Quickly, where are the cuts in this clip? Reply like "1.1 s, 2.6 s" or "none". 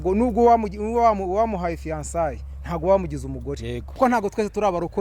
4.0 s